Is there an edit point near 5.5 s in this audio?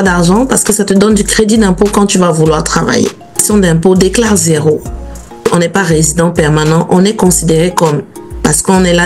yes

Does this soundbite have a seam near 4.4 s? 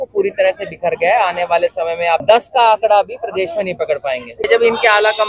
yes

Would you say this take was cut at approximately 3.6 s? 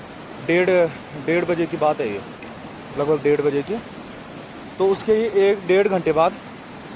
no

